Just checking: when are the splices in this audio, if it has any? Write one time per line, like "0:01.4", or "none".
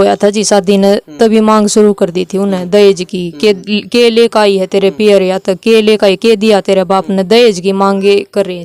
none

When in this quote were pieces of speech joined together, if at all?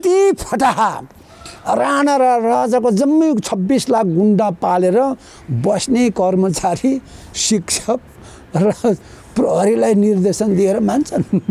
none

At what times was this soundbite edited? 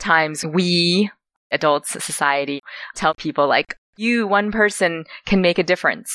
0:01.5
0:02.6

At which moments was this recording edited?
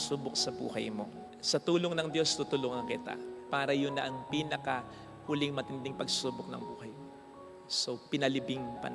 0:01.2

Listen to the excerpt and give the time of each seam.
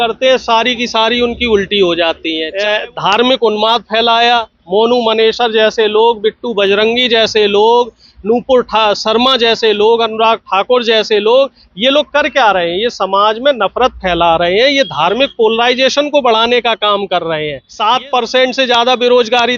0:02.4
0:17.6

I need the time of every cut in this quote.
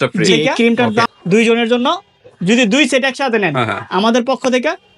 0:01.1

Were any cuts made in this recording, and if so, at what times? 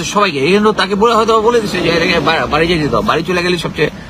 none

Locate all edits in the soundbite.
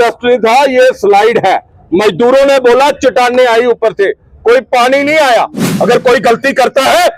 0:05.7

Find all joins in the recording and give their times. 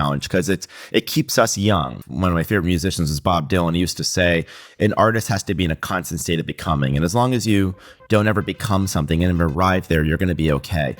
0:02.0

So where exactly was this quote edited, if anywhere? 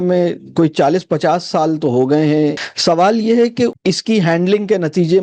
0:02.6
0:03.7

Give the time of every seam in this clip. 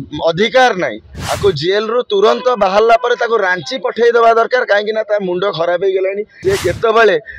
0:06.3

